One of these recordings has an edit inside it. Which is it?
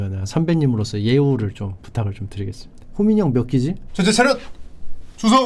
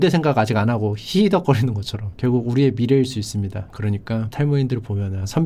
first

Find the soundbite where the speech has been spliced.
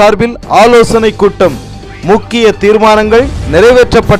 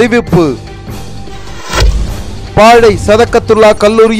second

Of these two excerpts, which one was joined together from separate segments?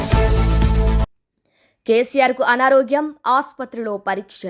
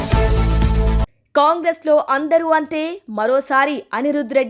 second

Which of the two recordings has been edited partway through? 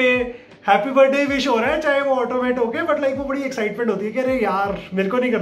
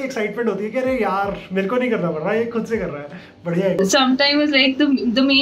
second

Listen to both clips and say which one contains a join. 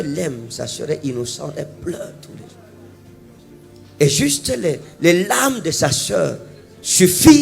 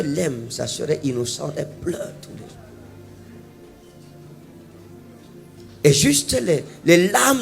first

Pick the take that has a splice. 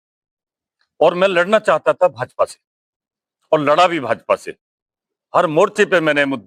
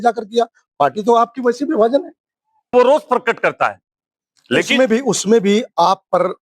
second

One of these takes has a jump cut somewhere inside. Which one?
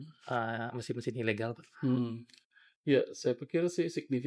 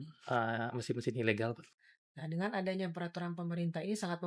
second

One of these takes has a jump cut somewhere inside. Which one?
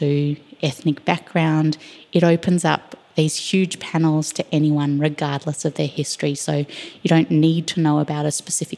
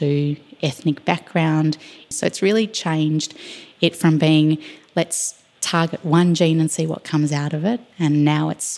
second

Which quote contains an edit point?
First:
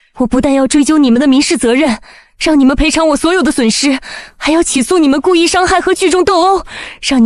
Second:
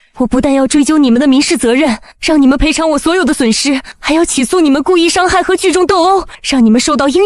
second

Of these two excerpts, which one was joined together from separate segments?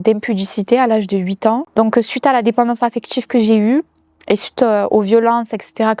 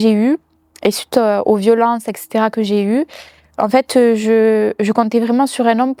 first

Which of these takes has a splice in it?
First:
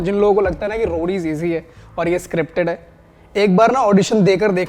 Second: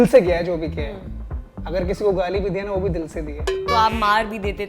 second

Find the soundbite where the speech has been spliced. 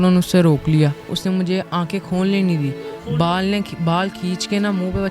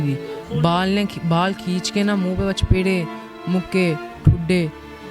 first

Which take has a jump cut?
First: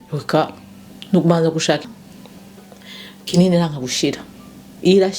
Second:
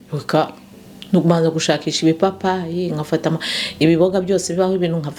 first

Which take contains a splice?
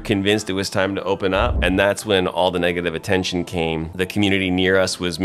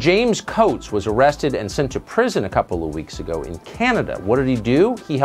first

